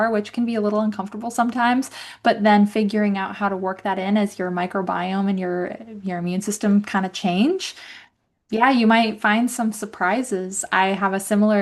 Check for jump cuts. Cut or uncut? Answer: uncut